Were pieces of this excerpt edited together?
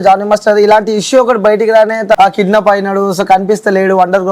yes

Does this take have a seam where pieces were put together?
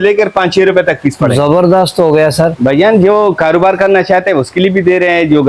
yes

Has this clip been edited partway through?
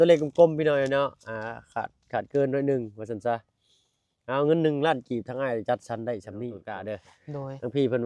yes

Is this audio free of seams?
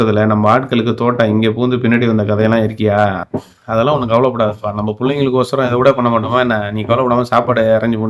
yes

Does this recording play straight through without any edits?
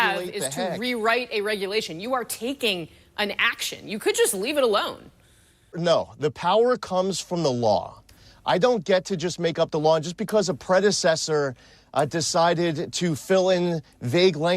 no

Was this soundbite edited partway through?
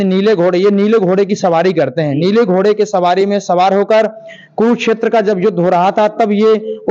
no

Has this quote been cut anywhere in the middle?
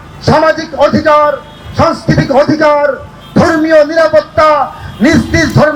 no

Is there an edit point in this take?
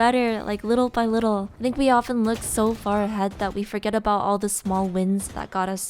no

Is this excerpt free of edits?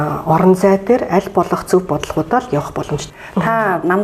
no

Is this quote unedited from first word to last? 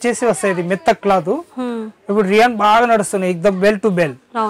yes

